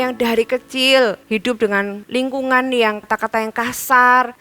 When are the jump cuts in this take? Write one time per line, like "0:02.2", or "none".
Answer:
0:01.6
0:03.0